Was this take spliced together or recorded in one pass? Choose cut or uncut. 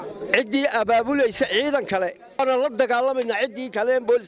cut